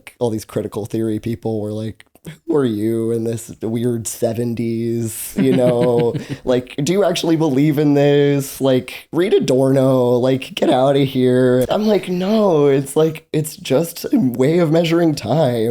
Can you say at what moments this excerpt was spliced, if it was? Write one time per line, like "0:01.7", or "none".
0:11.7